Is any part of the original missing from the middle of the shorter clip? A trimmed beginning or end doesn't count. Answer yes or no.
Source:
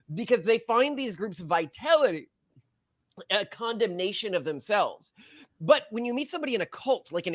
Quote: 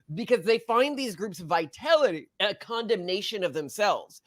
yes